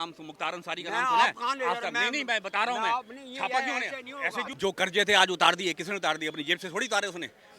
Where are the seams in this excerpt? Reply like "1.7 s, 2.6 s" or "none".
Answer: 4.5 s

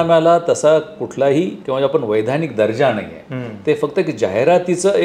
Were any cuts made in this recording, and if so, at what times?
1.6 s

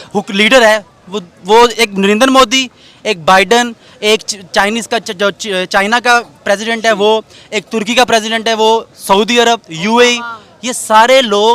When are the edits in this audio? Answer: none

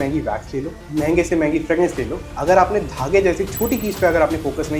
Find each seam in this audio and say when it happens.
none

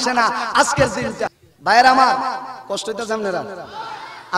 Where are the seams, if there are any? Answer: 1.5 s

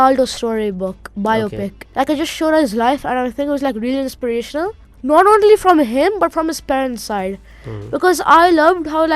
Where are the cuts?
1.8 s, 4.9 s

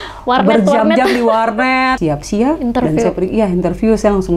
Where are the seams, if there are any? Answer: 2.0 s

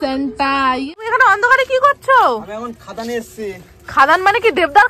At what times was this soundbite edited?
1.0 s

